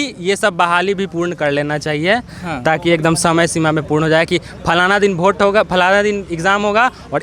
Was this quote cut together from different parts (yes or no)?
no